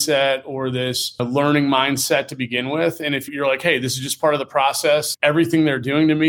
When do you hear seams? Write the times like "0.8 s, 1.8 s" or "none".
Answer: 1.2 s